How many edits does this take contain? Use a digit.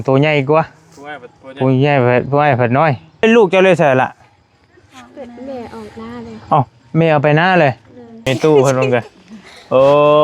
2